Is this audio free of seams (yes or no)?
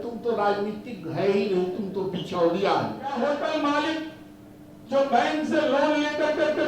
no